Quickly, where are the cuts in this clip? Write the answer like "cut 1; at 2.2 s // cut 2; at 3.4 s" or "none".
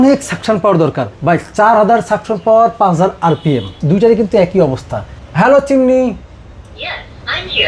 cut 1; at 1.1 s // cut 2; at 3.7 s // cut 3; at 5.1 s